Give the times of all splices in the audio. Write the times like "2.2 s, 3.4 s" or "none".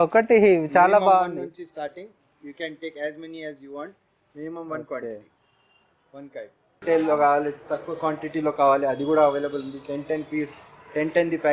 6.8 s